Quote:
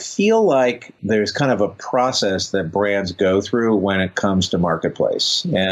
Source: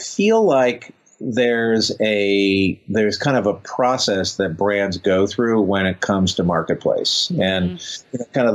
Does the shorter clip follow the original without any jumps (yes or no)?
no